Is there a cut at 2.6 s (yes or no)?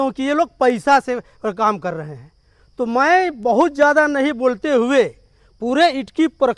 no